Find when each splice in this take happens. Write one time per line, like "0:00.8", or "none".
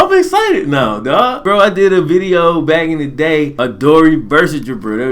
0:01.4
0:03.5